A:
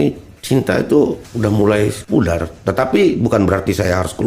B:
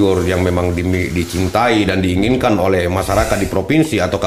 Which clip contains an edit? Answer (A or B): A